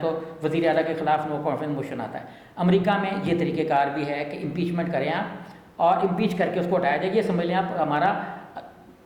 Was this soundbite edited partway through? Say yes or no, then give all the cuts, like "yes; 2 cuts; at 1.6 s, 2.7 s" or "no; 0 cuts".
no; 0 cuts